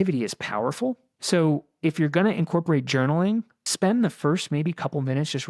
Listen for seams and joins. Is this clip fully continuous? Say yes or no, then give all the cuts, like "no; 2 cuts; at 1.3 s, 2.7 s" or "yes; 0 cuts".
no; 2 cuts; at 1.1 s, 3.6 s